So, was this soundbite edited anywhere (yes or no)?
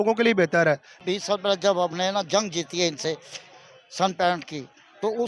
yes